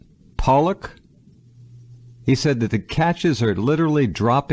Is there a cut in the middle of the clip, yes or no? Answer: no